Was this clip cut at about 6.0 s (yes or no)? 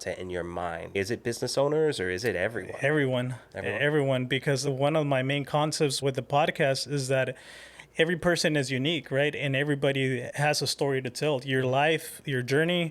yes